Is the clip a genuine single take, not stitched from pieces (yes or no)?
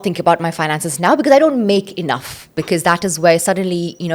no